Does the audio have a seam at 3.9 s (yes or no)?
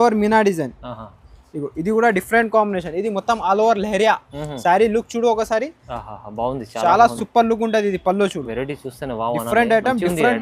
no